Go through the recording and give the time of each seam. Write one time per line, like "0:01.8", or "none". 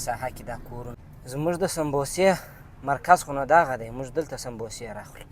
0:00.9

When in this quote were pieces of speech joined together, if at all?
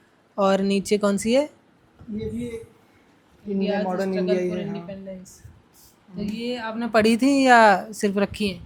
none

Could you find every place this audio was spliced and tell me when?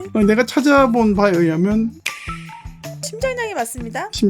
none

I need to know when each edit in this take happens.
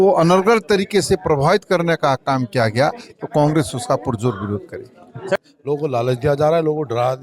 0:05.4

